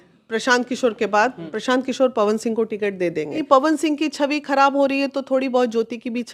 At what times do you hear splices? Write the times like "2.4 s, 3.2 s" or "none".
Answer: 1.5 s, 3.4 s